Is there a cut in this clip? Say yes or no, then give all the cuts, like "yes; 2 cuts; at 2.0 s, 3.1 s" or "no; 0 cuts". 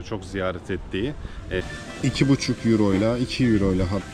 yes; 1 cut; at 1.6 s